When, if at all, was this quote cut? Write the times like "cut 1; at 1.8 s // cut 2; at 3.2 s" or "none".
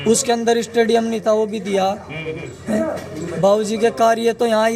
none